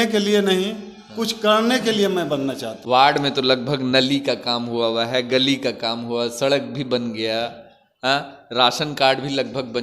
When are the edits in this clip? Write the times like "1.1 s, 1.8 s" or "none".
2.7 s